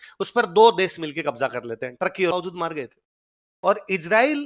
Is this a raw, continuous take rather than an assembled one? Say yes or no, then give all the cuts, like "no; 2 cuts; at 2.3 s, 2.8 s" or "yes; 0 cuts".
no; 1 cut; at 2.3 s